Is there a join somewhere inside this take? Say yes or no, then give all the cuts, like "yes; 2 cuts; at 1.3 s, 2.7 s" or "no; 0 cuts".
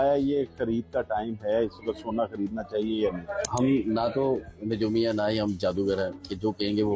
yes; 1 cut; at 3.5 s